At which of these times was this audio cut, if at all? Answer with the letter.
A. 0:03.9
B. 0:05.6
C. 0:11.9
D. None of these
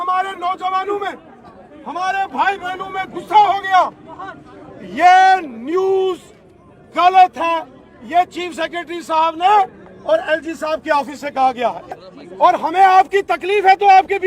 C